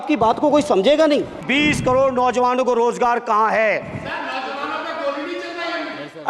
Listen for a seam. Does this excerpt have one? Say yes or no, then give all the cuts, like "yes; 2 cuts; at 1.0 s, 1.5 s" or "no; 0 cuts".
yes; 1 cut; at 1.5 s